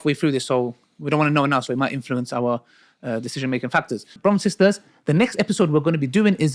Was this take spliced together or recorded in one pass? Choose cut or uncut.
cut